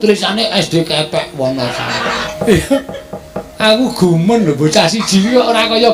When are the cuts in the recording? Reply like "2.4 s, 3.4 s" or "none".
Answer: 2.2 s